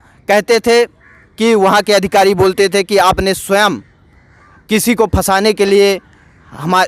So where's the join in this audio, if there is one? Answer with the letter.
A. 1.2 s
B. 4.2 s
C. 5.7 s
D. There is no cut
D